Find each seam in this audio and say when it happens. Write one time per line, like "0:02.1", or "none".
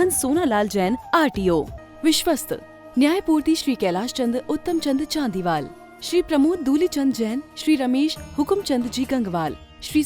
0:01.8